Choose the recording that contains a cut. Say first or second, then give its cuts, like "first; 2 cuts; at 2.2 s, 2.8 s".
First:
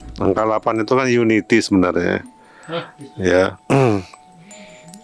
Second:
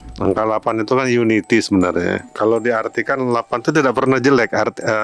second; 1 cut; at 2.3 s